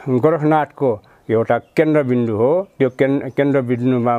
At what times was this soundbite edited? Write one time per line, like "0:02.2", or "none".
none